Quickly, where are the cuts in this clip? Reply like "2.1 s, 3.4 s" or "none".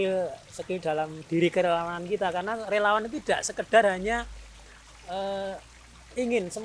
none

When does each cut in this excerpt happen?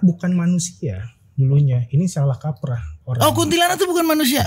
none

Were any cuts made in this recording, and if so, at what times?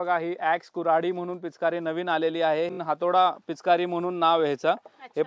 2.8 s

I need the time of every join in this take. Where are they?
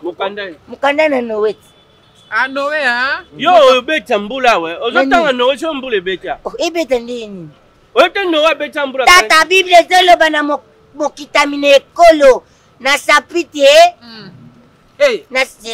none

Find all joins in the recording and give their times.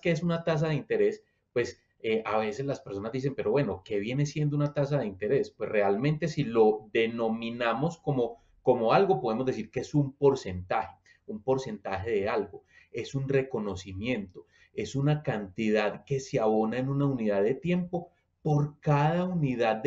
none

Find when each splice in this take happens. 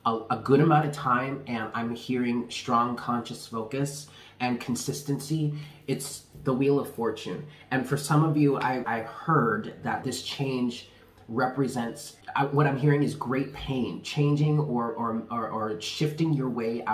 8.8 s, 10.0 s, 12.2 s

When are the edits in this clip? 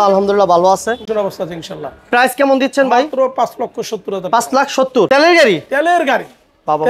1.1 s, 5.1 s

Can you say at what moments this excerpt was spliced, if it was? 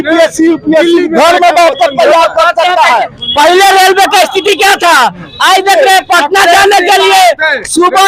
none

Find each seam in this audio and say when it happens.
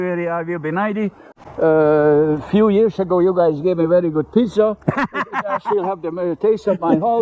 1.2 s

